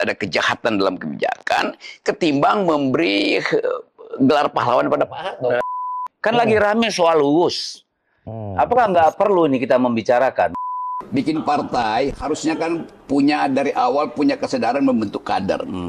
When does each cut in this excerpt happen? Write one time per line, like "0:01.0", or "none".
0:05.9
0:10.7